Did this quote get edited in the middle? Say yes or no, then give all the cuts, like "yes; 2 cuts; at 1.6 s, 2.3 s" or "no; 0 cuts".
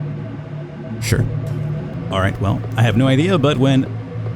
yes; 1 cut; at 1.9 s